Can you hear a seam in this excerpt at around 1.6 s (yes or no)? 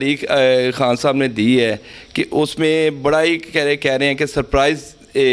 no